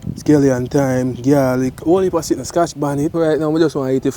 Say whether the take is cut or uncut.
cut